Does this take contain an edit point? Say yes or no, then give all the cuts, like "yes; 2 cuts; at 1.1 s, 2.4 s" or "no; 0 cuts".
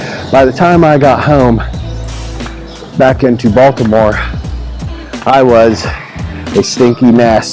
no; 0 cuts